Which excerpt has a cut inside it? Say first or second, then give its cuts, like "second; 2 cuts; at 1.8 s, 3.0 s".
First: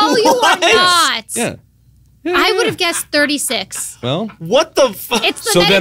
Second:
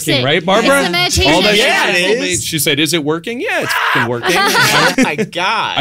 second; 1 cut; at 4.9 s